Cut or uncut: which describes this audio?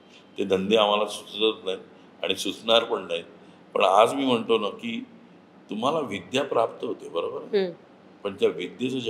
uncut